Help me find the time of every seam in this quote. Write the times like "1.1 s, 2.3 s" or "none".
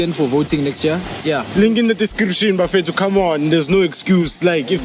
1.2 s